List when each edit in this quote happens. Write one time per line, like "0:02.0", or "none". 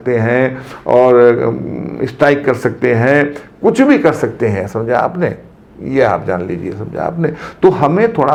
none